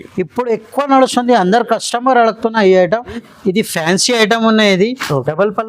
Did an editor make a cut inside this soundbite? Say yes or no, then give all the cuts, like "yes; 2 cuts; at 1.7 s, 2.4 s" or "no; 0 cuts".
yes; 1 cut; at 3.2 s